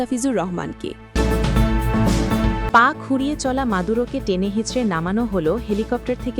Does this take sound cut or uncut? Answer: cut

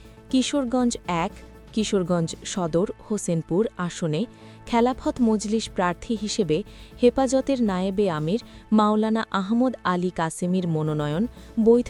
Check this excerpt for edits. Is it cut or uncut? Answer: uncut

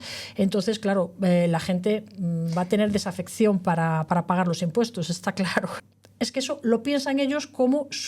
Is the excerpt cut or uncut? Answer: cut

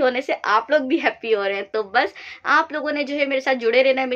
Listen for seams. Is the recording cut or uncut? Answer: uncut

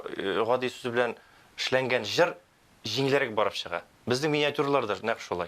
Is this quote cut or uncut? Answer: uncut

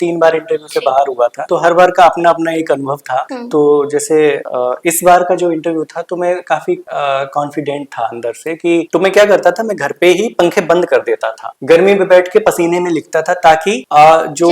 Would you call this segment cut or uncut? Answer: cut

